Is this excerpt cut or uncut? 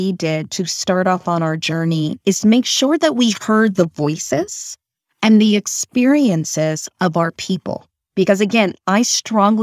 uncut